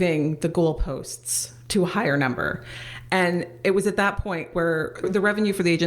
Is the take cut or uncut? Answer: cut